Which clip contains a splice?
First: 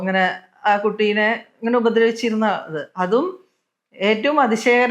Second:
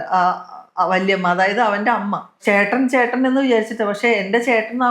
second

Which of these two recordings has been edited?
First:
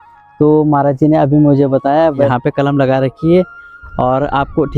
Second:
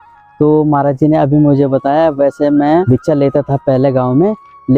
first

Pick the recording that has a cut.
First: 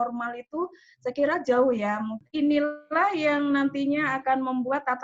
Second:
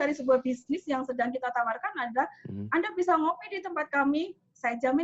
first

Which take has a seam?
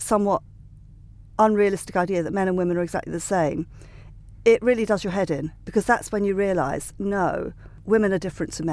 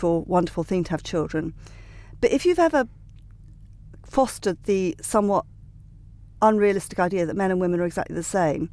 first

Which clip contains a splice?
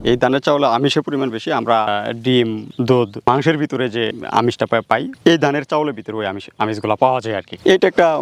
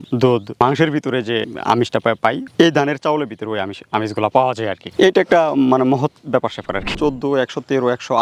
second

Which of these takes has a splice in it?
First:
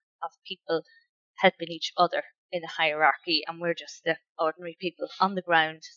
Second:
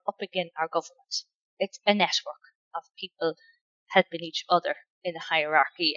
second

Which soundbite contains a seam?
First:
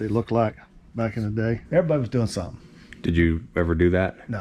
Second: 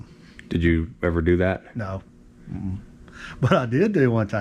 first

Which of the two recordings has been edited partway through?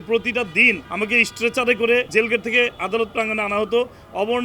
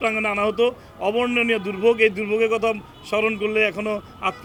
first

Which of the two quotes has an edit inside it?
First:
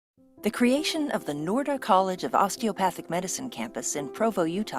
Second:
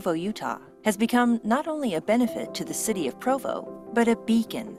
first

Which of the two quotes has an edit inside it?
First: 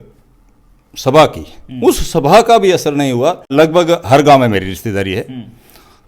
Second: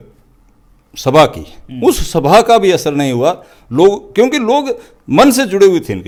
first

